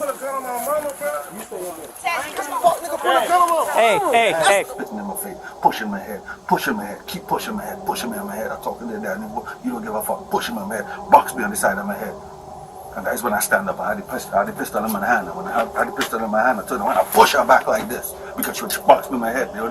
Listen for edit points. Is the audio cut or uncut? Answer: cut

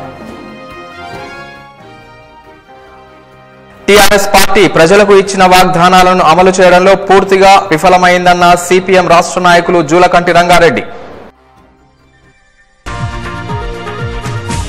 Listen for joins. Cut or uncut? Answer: cut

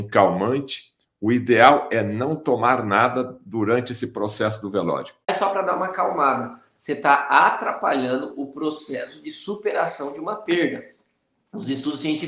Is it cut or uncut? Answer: cut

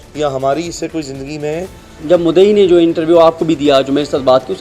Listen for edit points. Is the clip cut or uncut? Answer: cut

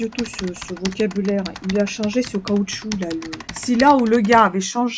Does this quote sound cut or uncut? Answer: cut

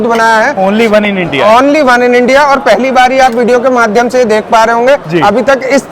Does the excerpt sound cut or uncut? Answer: uncut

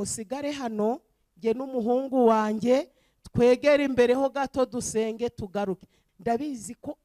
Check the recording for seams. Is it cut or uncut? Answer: cut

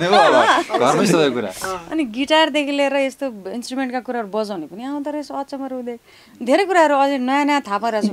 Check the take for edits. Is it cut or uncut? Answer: uncut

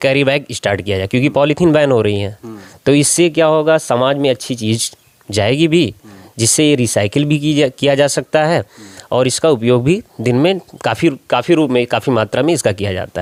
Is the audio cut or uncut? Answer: uncut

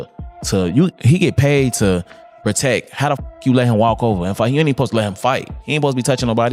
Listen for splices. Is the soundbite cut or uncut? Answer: uncut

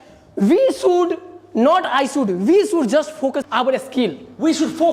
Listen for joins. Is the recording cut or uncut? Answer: cut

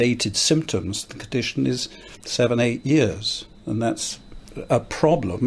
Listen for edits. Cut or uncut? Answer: uncut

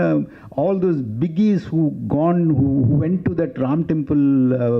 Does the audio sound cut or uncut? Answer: uncut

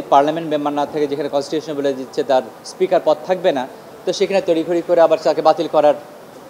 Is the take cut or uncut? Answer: uncut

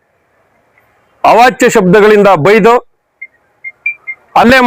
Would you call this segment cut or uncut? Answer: uncut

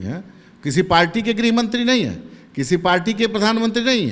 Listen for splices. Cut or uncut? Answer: uncut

